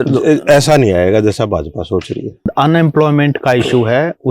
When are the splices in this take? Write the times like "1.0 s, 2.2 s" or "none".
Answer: 2.5 s